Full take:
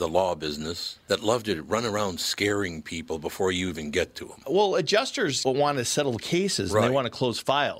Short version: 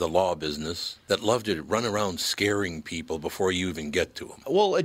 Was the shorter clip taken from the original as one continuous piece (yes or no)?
yes